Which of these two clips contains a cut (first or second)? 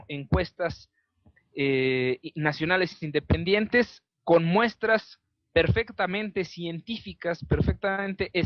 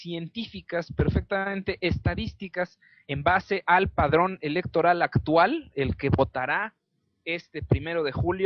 first